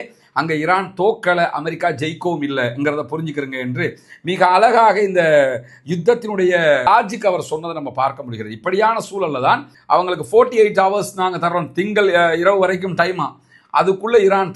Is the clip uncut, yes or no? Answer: no